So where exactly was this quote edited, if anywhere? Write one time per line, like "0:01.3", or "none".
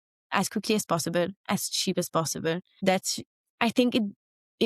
0:02.7